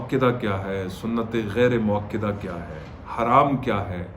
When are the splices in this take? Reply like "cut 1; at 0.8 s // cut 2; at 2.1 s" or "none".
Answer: none